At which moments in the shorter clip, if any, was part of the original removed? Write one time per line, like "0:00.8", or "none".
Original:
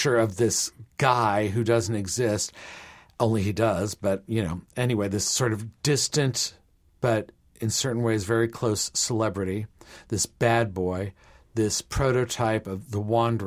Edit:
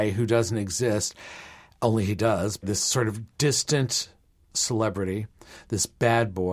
0:02.6
0:04.5